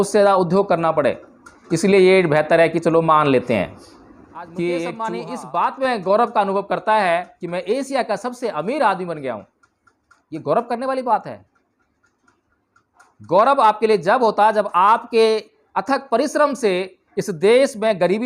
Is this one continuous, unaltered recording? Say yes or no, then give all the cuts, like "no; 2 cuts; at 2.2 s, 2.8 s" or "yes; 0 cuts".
no; 1 cut; at 5.2 s